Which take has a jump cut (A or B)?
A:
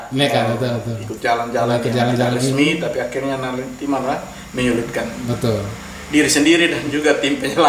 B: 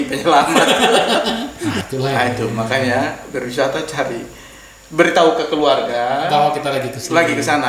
B